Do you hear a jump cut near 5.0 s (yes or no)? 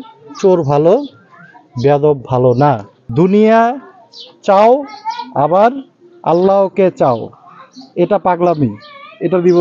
no